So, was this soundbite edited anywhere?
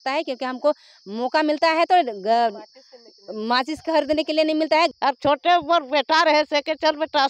yes; 1 cut; at 4.9 s

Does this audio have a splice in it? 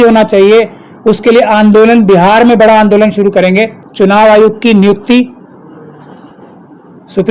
yes; 1 cut; at 3.8 s

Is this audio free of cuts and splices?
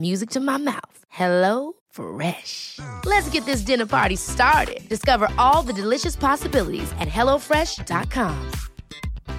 yes; 0 cuts

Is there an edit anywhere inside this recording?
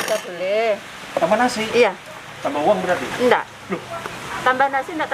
no; 0 cuts

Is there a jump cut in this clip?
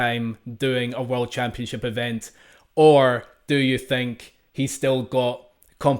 no; 0 cuts

